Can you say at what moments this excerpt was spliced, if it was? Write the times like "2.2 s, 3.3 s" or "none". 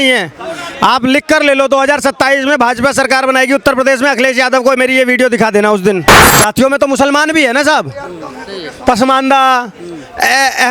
6.1 s